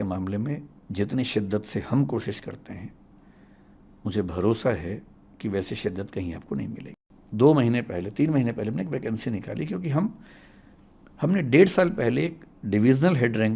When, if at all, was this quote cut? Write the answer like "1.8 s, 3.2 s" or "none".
6.9 s